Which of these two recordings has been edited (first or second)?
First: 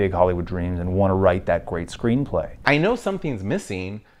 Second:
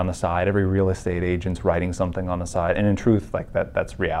first